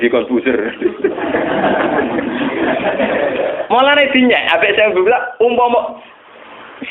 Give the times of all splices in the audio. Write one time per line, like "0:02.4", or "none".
none